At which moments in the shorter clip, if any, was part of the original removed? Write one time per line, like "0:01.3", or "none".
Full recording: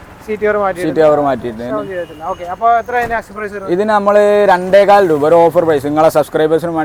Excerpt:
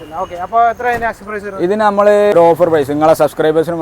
0:02.3